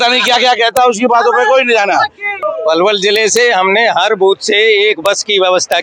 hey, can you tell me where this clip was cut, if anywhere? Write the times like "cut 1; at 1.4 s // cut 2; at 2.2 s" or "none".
cut 1; at 2.3 s